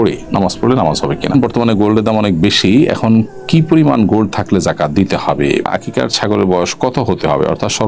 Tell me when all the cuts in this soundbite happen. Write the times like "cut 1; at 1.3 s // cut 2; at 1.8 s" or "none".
cut 1; at 1.3 s // cut 2; at 5.7 s